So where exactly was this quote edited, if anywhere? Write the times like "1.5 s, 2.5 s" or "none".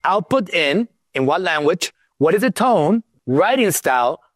3.1 s